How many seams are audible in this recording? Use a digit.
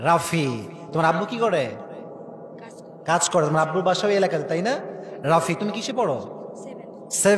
0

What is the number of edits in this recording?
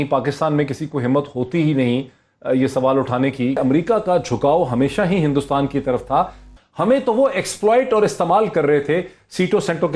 2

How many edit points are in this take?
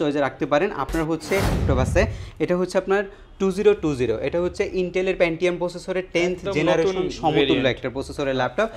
1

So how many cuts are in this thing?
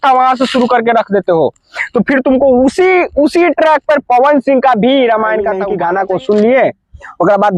1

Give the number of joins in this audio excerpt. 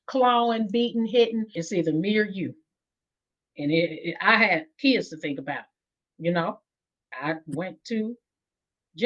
1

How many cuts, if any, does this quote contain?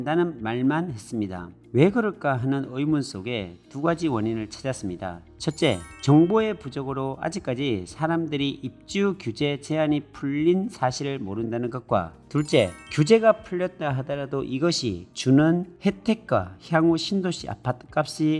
1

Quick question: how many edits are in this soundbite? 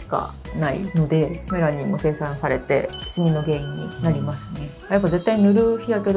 1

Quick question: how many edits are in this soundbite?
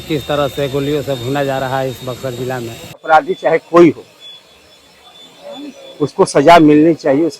1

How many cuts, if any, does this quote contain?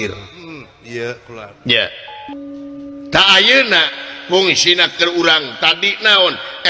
1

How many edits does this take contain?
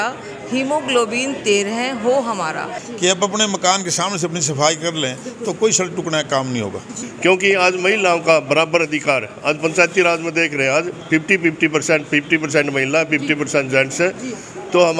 2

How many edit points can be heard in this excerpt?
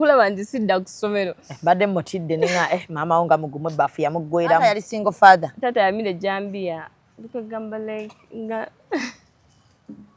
1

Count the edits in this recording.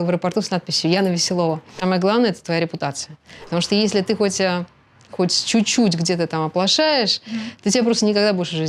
2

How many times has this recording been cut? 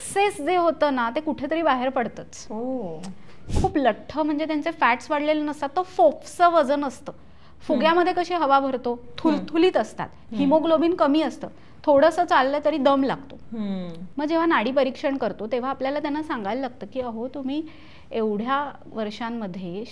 1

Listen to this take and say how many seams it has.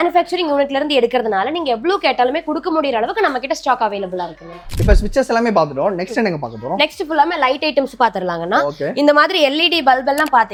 0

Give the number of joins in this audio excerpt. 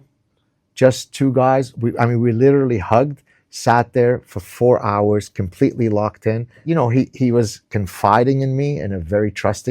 1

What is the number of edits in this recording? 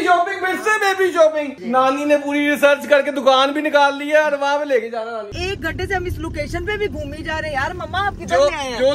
2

